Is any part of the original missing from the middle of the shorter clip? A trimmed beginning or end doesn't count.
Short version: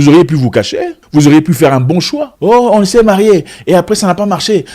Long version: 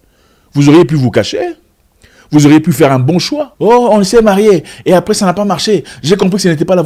yes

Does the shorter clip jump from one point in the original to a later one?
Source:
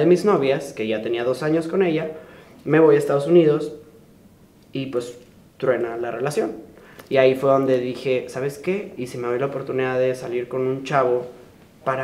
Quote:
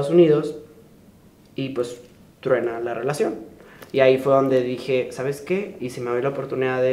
no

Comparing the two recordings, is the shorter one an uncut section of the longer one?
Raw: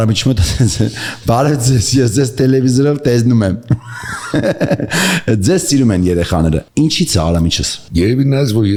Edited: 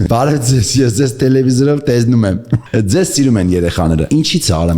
no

